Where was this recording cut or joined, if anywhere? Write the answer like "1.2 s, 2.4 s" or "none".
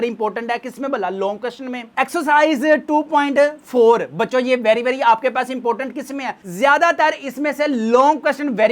none